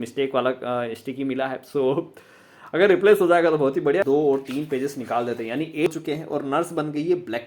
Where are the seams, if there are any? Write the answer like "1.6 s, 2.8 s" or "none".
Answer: 4.0 s, 5.9 s